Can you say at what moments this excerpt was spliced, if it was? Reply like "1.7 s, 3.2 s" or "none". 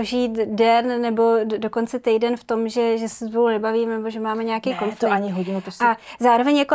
none

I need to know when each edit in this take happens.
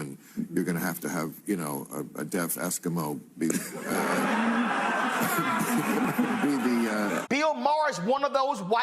7.2 s

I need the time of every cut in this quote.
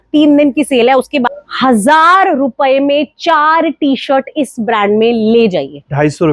1.3 s

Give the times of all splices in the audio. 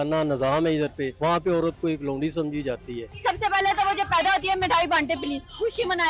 1.1 s, 3.2 s

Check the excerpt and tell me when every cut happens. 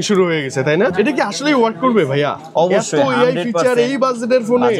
0.9 s

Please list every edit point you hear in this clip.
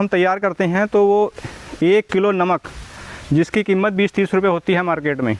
none

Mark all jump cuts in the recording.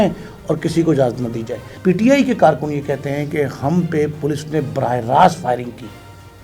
1.7 s

